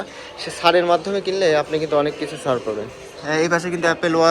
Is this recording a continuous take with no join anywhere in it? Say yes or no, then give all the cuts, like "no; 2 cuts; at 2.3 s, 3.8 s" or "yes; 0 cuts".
no; 1 cut; at 3.0 s